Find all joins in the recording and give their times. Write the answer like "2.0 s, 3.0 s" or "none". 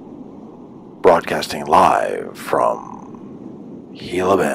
1.0 s